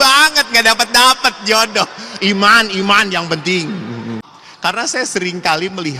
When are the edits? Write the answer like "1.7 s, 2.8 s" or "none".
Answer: 4.7 s